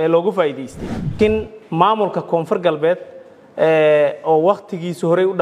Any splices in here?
yes; 1 cut; at 1.1 s

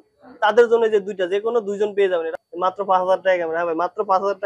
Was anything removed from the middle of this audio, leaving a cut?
yes; 1 cut; at 2.3 s

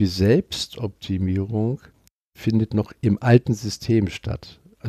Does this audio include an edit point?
no; 0 cuts

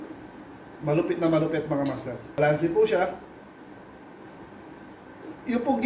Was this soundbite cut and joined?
yes; 1 cut; at 2.4 s

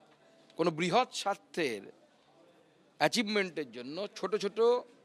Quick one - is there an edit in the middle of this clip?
no; 0 cuts

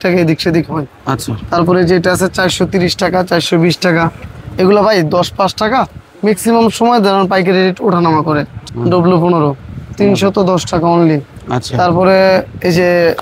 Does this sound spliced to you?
yes; 1 cut; at 8.5 s

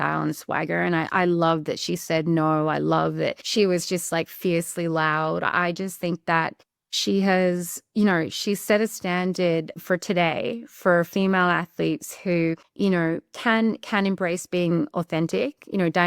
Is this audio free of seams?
no; 3 cuts; at 3.4 s, 9.8 s, 12.5 s

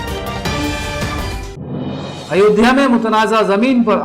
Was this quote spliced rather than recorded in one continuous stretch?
yes; 1 cut; at 2.2 s

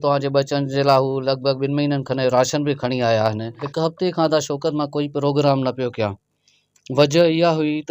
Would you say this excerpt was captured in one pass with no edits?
no; 1 cut; at 3.6 s

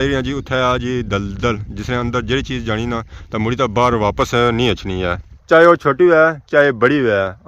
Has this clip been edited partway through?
no; 0 cuts

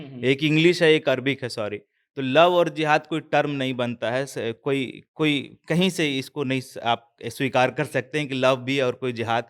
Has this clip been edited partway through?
no; 0 cuts

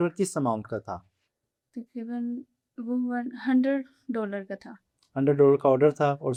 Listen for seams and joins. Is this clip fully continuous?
yes; 0 cuts

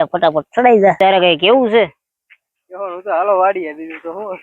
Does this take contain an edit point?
yes; 1 cut; at 1.0 s

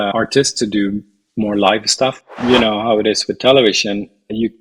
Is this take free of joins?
no; 1 cut; at 2.3 s

